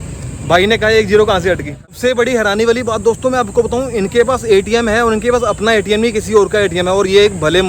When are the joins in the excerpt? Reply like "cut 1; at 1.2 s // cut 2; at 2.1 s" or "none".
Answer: cut 1; at 2.0 s

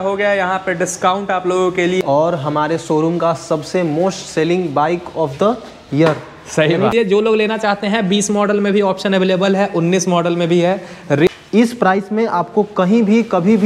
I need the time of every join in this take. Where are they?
cut 1; at 2.0 s // cut 2; at 6.9 s // cut 3; at 11.3 s

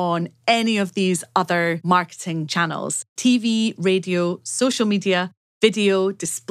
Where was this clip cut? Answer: cut 1; at 1.9 s

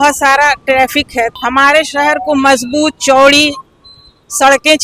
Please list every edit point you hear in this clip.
cut 1; at 1.3 s

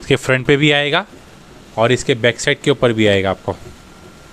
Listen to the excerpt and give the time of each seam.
none

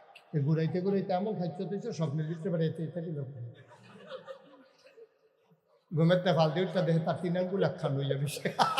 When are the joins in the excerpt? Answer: none

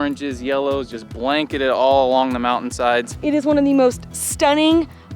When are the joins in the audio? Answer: cut 1; at 3.1 s

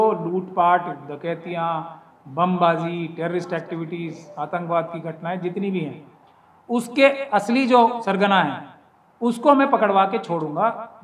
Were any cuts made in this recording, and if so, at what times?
none

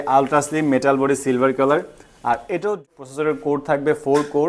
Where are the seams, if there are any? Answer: cut 1; at 2.9 s

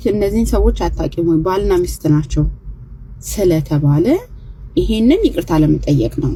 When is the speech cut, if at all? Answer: none

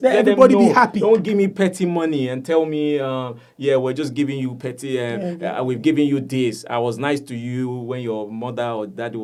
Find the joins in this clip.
none

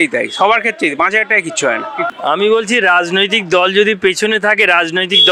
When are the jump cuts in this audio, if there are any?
none

